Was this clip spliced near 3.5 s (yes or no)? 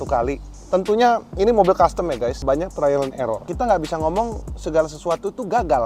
yes